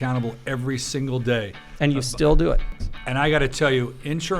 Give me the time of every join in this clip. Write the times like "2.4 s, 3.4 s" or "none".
2.7 s